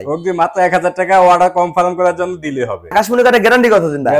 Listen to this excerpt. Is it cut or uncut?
cut